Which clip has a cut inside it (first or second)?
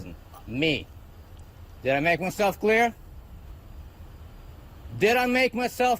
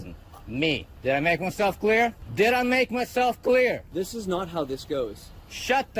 second